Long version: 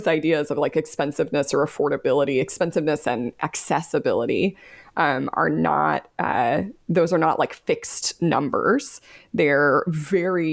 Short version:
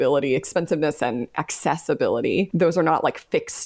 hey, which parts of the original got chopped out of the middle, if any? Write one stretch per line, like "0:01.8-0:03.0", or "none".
0:04.6-0:06.9